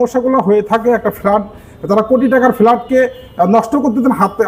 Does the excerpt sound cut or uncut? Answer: uncut